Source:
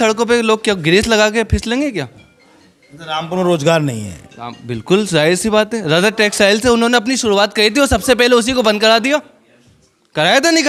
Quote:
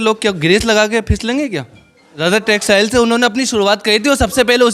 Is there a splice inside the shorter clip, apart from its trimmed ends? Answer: yes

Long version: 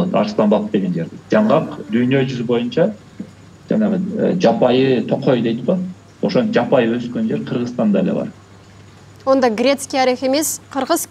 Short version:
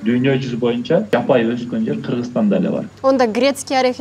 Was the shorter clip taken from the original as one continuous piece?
no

